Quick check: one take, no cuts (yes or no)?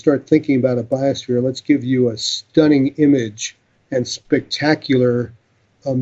no